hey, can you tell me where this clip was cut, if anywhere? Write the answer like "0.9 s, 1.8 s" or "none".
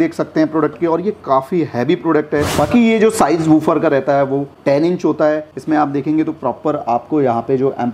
none